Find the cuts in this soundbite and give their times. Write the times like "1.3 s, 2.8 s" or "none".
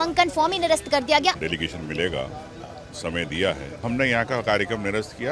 1.4 s, 3.8 s